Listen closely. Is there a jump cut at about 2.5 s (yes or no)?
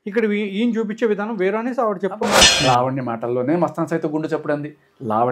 yes